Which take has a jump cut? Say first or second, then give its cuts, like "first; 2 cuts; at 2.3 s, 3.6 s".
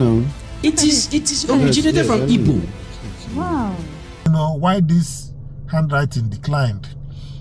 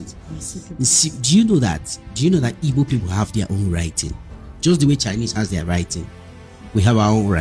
first; 1 cut; at 4.3 s